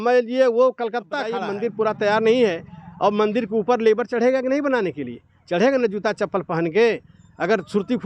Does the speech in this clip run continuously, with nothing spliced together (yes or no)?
no